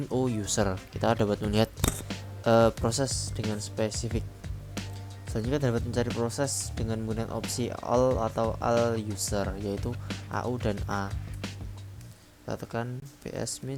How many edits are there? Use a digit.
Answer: 0